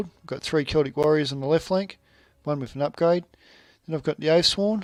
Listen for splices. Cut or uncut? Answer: uncut